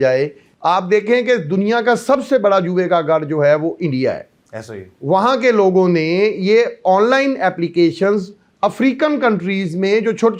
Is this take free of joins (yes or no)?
yes